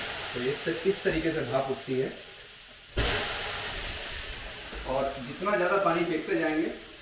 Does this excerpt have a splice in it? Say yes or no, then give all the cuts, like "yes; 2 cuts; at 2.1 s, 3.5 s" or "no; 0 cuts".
no; 0 cuts